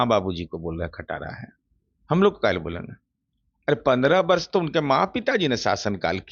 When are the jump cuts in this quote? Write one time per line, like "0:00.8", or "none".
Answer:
none